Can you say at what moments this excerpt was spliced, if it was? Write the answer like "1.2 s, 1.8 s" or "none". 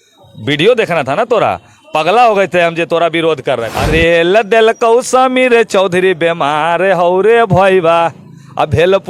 3.7 s